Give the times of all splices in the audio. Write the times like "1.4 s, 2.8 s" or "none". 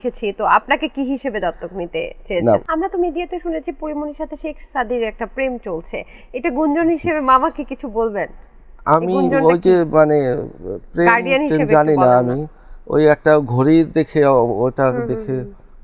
2.6 s